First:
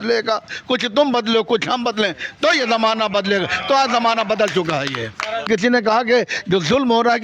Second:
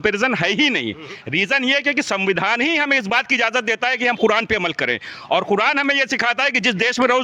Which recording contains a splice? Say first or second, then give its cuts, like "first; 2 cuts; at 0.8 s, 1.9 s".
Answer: first; 1 cut; at 5.4 s